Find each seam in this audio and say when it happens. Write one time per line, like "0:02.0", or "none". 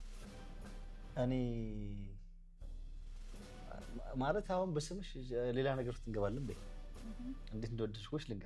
0:00.9